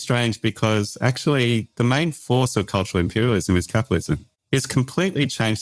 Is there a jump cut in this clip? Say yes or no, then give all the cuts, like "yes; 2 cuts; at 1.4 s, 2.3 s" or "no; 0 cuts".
no; 0 cuts